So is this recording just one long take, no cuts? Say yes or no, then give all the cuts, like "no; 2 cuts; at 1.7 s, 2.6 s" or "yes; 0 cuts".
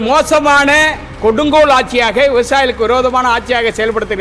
yes; 0 cuts